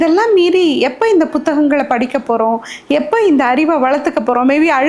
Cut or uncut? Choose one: uncut